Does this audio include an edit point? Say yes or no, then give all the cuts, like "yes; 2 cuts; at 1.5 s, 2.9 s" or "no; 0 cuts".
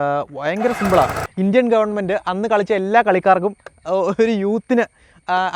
yes; 1 cut; at 1.2 s